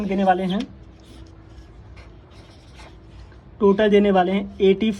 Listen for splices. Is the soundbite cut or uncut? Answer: uncut